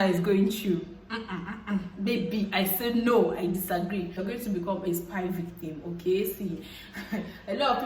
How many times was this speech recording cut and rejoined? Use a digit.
1